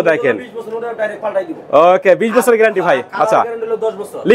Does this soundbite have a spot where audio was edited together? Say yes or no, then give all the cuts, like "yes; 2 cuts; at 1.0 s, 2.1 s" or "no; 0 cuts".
no; 0 cuts